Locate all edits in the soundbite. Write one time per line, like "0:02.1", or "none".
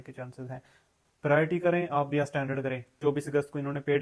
0:02.8